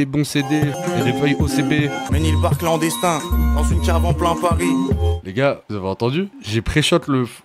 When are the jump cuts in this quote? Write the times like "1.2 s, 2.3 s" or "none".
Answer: 0.8 s, 2.1 s